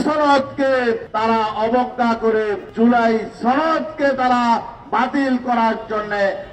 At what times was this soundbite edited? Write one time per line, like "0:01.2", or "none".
0:01.1
0:02.6